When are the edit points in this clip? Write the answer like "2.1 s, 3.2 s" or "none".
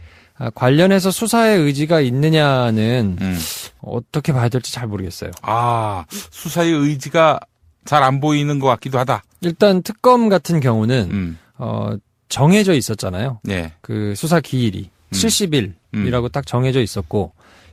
none